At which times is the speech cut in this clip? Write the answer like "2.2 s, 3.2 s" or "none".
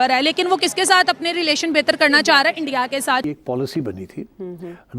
3.2 s